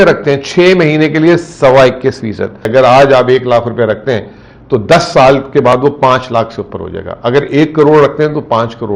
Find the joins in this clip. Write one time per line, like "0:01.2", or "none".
0:02.7

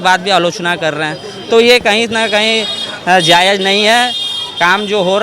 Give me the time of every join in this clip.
none

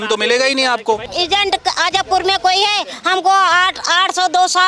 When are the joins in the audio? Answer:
0:01.1

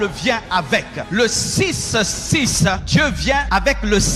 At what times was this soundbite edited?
0:01.0
0:03.2

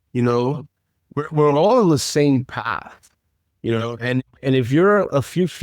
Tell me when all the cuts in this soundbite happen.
none

